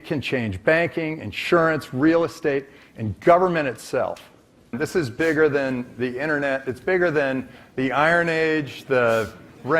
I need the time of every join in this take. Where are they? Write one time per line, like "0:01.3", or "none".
0:04.7